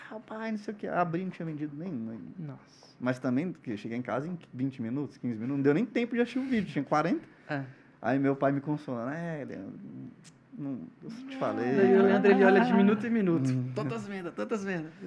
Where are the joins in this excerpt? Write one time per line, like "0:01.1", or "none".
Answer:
none